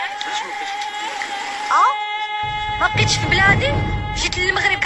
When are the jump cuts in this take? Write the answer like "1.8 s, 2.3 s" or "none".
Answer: none